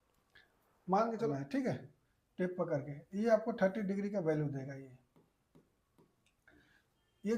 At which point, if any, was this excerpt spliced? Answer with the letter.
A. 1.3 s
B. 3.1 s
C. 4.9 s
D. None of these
A